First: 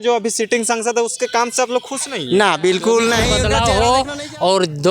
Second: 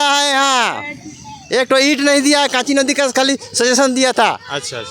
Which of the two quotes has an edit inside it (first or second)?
first